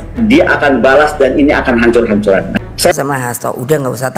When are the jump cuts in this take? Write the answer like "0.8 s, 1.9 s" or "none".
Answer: 2.9 s